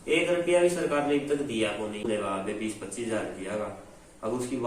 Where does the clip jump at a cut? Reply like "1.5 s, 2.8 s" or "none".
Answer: 2.1 s

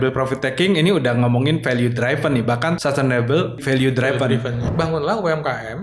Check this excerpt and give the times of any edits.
2.8 s, 3.6 s, 4.6 s

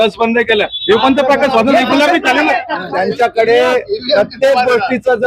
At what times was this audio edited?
2.8 s

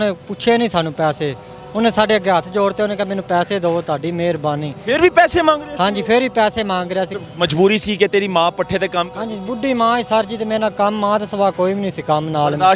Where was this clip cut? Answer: 7.1 s

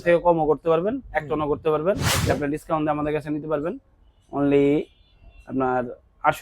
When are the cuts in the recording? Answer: 2.1 s

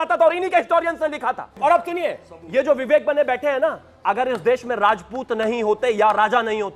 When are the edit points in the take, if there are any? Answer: 1.6 s

